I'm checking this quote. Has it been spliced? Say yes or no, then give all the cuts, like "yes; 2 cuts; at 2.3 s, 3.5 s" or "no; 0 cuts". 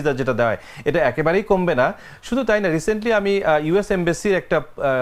no; 0 cuts